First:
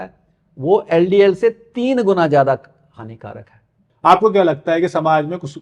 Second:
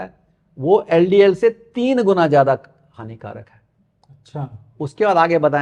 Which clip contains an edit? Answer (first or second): first